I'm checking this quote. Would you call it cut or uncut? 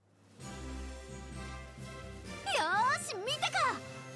cut